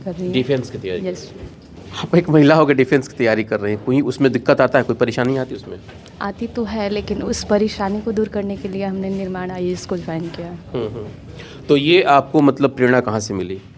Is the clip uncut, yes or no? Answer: yes